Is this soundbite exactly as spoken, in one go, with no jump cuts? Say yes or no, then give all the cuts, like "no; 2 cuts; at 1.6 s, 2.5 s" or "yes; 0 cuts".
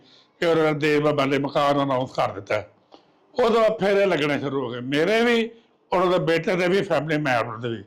yes; 0 cuts